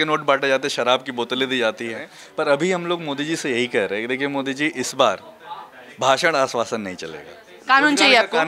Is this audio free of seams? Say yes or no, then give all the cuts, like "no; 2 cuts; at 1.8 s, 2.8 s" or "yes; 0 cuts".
no; 1 cut; at 2.2 s